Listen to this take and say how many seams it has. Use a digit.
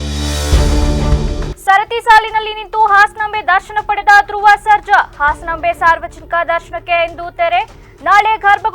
1